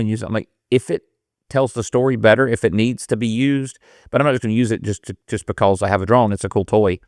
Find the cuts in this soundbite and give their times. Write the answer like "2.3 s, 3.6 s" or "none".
none